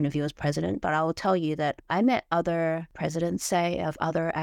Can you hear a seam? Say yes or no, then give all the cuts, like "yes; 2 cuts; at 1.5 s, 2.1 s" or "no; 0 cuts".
yes; 1 cut; at 2.9 s